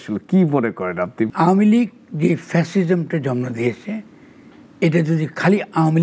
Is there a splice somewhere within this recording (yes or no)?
yes